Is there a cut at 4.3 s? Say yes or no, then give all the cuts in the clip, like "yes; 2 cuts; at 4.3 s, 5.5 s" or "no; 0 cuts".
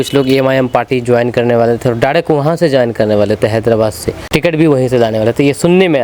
yes; 1 cut; at 4.3 s